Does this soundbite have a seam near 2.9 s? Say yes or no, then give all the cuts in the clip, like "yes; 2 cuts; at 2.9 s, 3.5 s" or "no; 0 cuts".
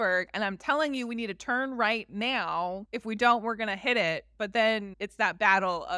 yes; 2 cuts; at 2.9 s, 5.0 s